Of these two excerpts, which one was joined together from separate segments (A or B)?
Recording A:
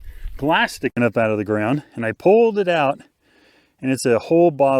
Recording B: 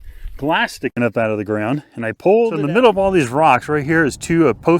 B